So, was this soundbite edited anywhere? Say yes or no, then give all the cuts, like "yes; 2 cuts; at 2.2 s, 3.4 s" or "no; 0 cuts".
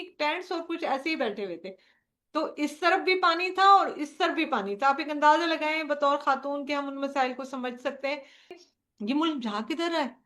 yes; 1 cut; at 8.6 s